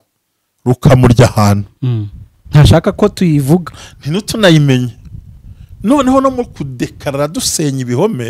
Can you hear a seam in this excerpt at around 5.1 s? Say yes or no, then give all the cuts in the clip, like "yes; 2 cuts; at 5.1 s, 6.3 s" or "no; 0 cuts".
no; 0 cuts